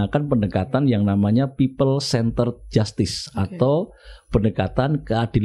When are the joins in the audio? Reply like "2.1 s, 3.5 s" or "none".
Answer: none